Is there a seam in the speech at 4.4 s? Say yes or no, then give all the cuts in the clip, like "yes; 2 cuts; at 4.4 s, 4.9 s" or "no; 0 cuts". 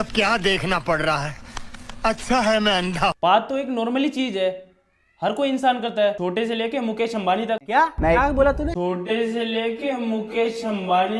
no; 1 cut; at 3.2 s